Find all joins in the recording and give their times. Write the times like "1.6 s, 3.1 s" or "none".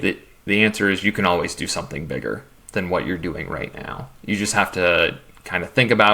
2.5 s

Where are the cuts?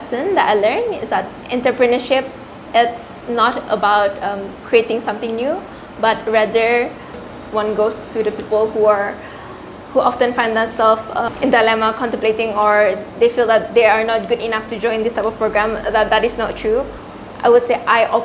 7.2 s, 11.3 s, 17.0 s

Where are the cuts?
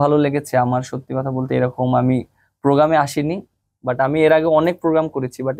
none

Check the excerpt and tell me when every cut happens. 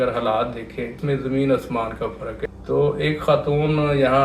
1.0 s, 2.4 s

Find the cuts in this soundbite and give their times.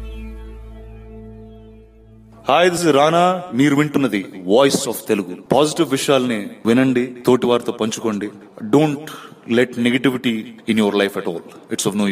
1.2 s, 2.8 s

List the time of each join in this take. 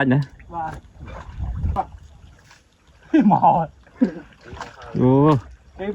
1.8 s

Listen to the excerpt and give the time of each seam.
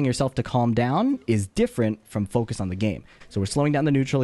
3.2 s

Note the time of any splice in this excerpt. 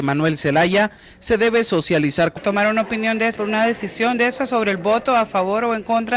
none

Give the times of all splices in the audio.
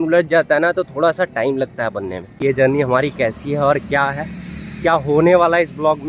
2.4 s

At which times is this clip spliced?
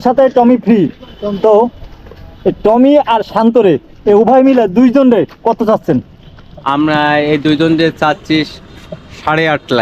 none

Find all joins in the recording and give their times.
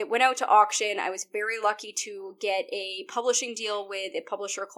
none

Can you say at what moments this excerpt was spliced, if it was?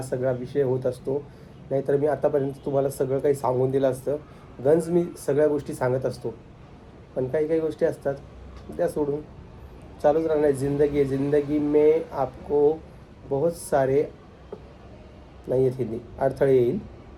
none

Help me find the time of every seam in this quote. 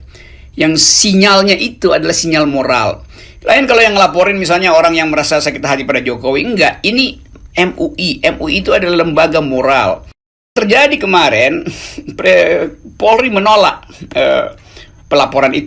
10.5 s

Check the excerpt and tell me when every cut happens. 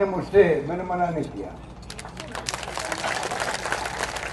none

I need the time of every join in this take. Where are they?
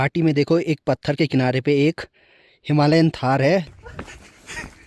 3.7 s

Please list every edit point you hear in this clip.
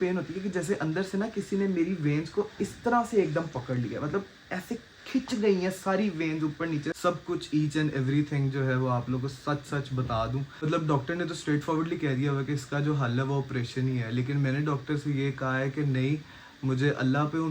7.0 s, 10.6 s

